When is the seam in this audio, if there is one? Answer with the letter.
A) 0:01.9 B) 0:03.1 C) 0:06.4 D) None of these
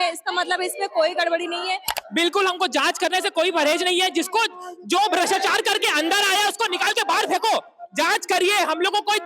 A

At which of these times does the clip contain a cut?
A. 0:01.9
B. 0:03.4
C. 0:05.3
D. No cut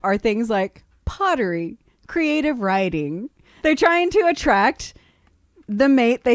B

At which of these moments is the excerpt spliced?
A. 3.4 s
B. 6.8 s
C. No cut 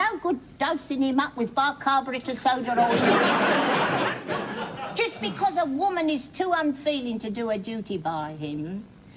B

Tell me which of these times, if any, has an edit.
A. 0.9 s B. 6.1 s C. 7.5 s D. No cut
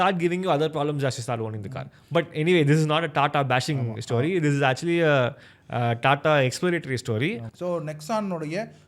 C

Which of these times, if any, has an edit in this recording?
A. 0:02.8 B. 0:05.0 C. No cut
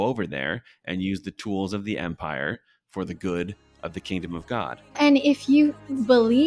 B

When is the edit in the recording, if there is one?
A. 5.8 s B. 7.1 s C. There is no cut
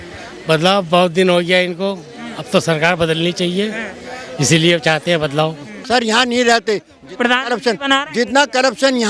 A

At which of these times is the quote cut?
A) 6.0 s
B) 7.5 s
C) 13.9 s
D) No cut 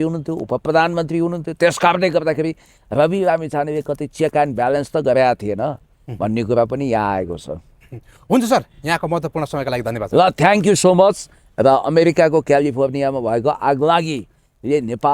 D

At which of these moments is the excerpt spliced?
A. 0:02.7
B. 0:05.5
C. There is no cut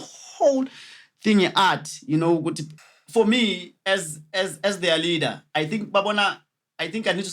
A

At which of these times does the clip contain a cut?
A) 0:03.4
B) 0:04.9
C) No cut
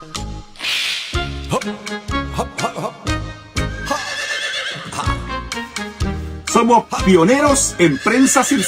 A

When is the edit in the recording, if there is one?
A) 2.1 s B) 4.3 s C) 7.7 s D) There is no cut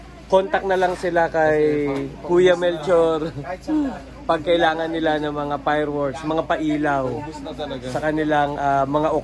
D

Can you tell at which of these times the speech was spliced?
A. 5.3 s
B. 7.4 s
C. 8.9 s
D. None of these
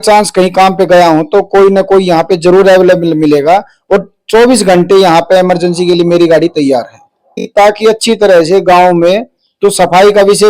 B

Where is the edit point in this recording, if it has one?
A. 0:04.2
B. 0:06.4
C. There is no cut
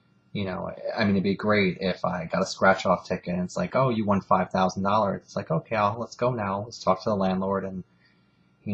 B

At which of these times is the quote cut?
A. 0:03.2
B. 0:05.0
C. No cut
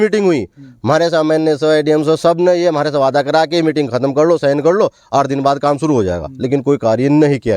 C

